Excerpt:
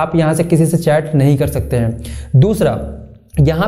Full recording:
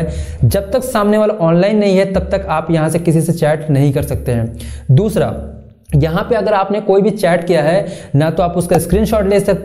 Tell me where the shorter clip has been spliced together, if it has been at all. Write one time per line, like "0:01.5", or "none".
none